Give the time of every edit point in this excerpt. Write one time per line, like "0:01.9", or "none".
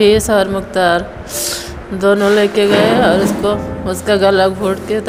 none

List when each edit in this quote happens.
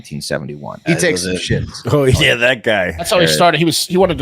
0:00.8
0:01.8
0:03.0

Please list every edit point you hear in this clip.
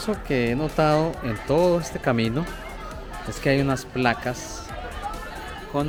none

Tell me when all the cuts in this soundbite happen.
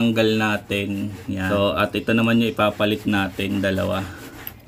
0:01.5

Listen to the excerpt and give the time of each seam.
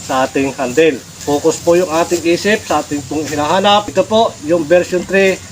0:01.1
0:03.9

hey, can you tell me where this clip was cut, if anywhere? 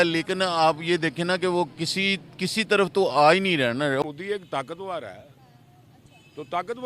0:04.0

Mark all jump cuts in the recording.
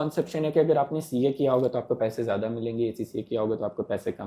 none

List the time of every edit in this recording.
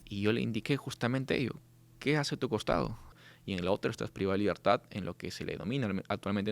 0:03.3

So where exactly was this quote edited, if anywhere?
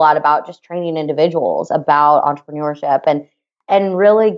none

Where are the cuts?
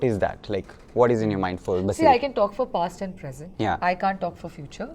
none

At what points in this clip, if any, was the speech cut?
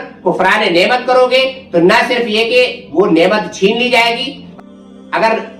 0:04.4

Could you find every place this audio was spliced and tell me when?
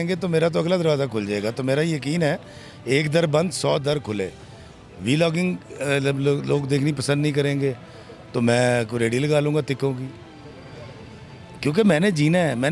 none

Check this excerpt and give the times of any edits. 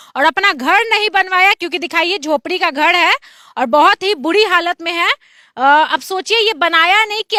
none

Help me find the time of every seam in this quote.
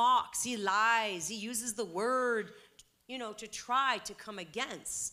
none

